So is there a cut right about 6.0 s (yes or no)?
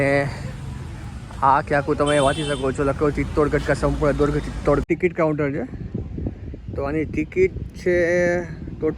no